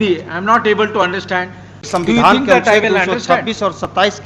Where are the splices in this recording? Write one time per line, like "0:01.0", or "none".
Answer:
0:01.9